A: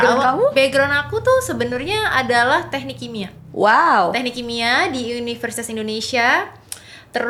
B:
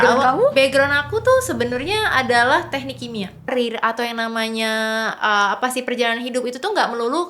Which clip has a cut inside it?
B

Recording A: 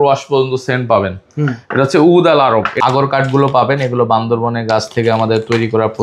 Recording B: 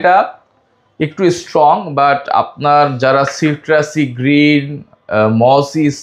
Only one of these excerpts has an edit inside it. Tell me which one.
A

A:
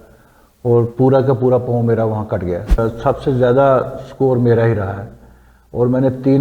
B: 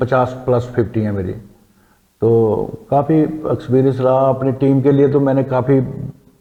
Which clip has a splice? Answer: A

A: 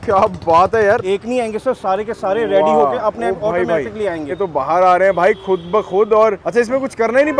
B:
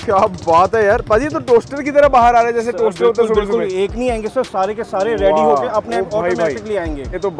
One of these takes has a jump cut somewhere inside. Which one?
A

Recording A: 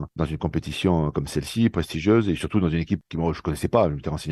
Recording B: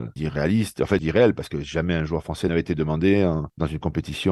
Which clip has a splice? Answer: B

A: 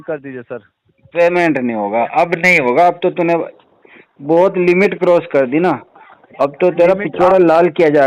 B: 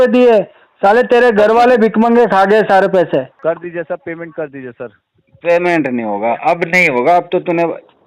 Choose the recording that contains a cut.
B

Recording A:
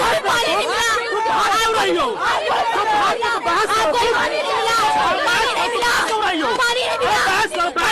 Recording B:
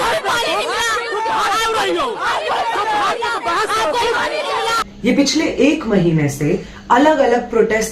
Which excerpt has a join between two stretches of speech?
B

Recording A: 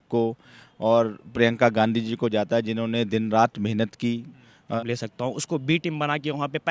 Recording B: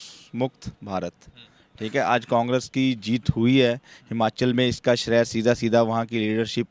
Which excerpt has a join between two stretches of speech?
A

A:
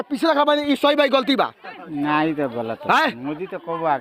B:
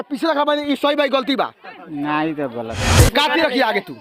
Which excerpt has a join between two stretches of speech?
B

